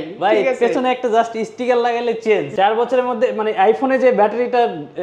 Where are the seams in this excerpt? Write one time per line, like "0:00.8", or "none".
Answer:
0:02.5